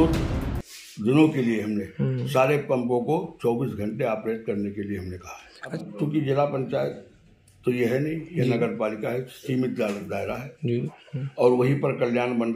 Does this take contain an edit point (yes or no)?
yes